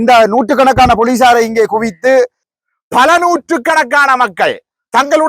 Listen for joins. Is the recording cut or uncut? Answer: cut